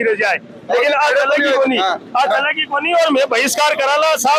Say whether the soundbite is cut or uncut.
uncut